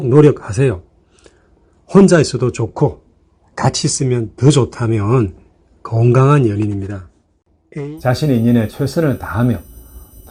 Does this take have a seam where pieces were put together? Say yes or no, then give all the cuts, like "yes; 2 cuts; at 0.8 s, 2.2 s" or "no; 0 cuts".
yes; 1 cut; at 7.9 s